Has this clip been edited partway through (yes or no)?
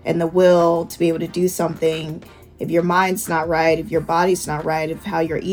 yes